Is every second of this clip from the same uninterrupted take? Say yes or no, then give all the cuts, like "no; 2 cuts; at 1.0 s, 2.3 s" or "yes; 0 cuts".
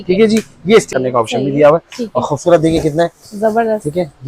no; 1 cut; at 0.9 s